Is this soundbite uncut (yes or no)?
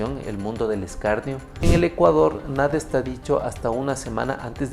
no